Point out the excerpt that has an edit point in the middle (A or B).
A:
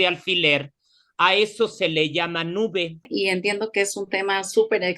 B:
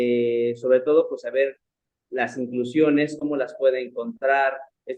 A